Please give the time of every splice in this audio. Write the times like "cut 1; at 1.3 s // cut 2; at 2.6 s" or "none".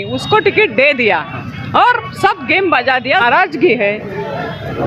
cut 1; at 3.2 s

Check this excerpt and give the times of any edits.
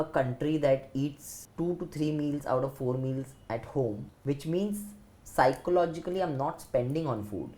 none

